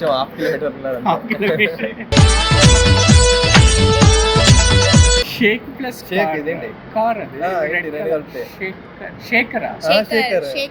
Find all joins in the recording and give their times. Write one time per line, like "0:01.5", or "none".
none